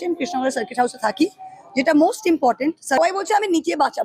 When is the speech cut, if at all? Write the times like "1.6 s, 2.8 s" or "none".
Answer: 3.0 s